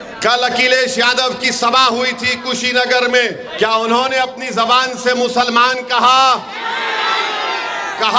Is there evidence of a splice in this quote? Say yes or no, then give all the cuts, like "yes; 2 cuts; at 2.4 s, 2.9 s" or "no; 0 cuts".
yes; 1 cut; at 3.4 s